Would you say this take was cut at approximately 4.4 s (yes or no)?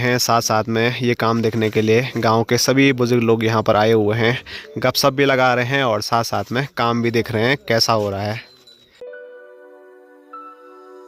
no